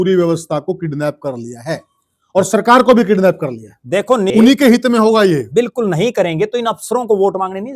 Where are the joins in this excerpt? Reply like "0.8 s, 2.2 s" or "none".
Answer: 4.3 s

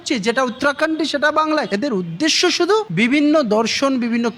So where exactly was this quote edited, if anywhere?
1.7 s

